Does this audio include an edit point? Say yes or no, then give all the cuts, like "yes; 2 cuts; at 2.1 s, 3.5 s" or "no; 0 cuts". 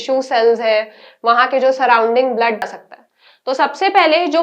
yes; 1 cut; at 2.6 s